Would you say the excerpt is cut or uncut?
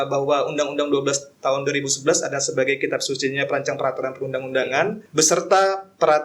cut